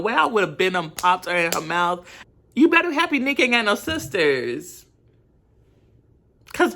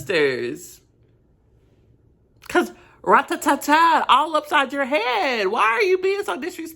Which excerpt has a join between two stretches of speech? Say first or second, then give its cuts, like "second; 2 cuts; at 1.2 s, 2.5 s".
first; 1 cut; at 2.1 s